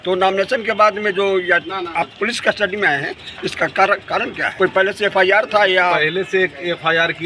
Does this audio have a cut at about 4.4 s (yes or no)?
yes